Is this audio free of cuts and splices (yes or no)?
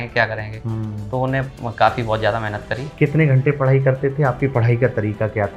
no